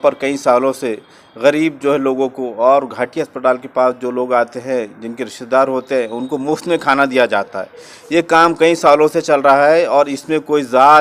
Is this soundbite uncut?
yes; 0 cuts

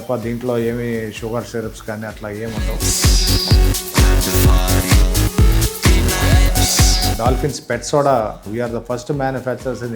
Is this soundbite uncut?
no; 2 cuts; at 2.7 s, 7.1 s

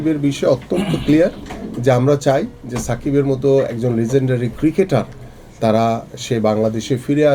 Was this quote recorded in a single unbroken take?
yes; 0 cuts

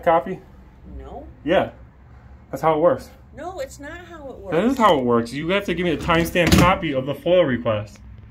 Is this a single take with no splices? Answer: yes; 0 cuts

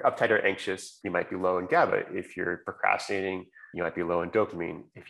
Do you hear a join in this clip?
yes; 2 cuts; at 0.9 s, 3.6 s

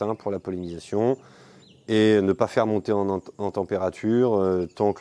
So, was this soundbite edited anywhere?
no; 0 cuts

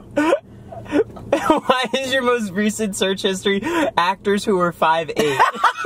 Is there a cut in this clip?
no; 0 cuts

